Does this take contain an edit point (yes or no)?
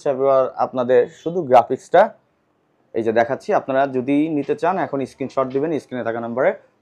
no